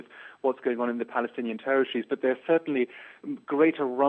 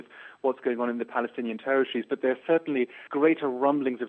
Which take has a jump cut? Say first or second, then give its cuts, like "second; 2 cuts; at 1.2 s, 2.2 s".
second; 1 cut; at 3.0 s